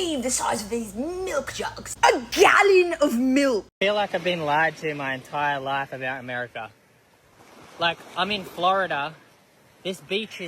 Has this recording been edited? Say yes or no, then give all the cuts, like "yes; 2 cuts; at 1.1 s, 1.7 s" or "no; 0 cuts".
yes; 1 cut; at 3.7 s